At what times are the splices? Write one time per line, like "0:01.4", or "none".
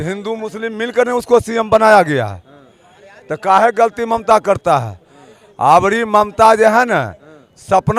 none